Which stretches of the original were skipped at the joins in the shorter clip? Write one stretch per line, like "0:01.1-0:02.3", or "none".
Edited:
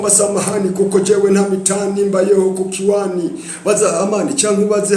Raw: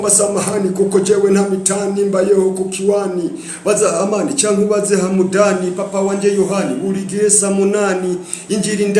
none